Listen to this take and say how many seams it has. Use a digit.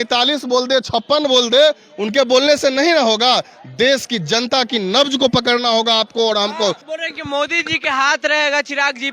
1